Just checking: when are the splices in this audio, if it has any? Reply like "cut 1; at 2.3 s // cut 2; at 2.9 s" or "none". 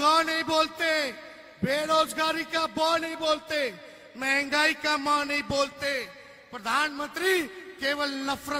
none